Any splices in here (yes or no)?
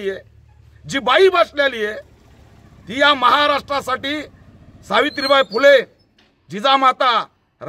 no